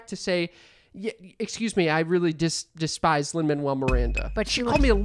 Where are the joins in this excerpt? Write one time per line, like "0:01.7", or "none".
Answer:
none